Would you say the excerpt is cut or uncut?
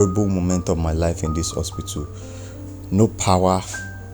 uncut